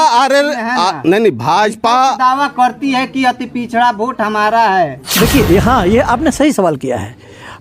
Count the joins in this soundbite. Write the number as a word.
one